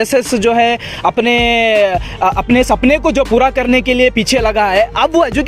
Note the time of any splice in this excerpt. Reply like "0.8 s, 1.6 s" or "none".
none